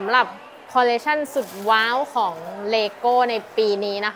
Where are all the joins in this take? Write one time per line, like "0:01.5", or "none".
none